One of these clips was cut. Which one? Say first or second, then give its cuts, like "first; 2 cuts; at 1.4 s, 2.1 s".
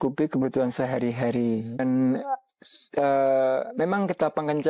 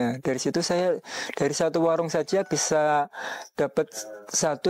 first; 1 cut; at 1.8 s